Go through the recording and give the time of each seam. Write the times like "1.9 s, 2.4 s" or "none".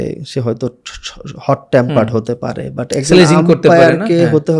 none